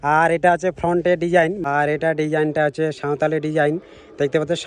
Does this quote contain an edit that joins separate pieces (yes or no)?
yes